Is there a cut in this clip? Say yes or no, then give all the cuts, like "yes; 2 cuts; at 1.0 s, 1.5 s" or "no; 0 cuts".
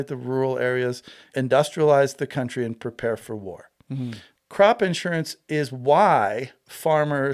yes; 1 cut; at 4.3 s